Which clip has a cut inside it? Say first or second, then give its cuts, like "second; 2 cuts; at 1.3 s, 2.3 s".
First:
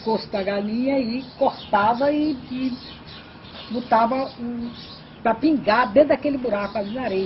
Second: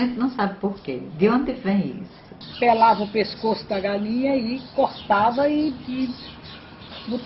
second; 1 cut; at 2.3 s